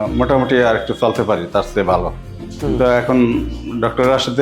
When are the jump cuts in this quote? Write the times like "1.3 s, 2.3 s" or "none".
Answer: 2.2 s